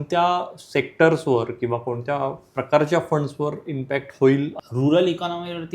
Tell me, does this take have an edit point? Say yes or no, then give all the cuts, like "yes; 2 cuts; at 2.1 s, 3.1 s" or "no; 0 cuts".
yes; 1 cut; at 4.6 s